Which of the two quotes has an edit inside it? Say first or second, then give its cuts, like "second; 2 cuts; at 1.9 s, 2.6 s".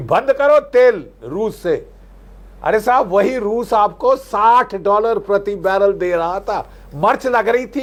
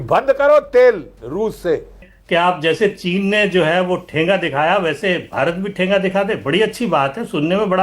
second; 1 cut; at 2.1 s